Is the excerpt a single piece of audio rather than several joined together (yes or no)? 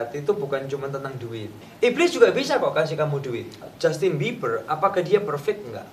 no